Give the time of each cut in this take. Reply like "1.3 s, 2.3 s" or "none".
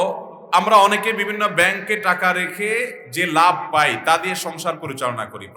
none